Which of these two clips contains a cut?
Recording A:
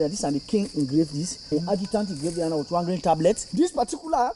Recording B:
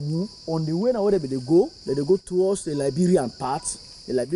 A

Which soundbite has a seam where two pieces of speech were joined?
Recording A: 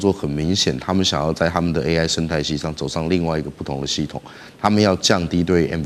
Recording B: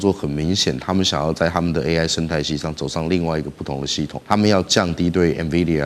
B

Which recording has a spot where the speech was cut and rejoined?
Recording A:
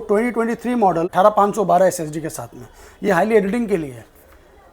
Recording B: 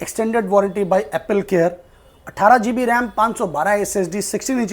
A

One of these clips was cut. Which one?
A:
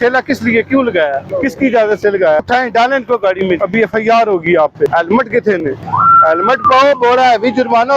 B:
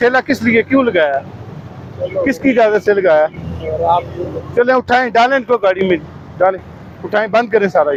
A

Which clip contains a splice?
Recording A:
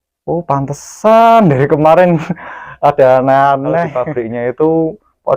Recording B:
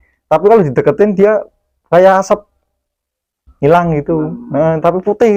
A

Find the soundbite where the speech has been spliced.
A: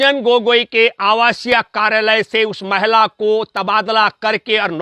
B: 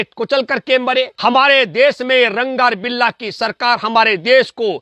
B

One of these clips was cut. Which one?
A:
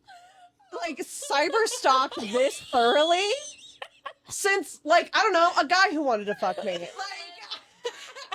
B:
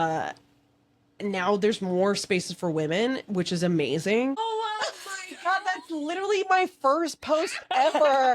B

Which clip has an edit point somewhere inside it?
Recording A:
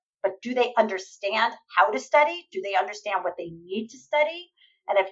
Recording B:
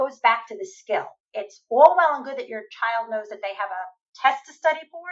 B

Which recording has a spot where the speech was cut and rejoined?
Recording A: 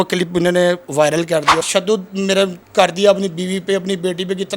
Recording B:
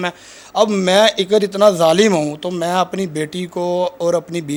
A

